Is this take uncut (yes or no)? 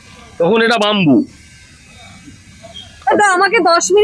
yes